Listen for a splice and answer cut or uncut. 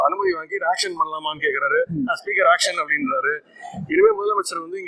uncut